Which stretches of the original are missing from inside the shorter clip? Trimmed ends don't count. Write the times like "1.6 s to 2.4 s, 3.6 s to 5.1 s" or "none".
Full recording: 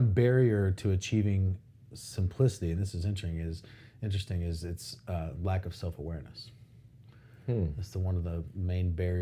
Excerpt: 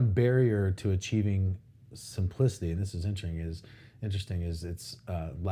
none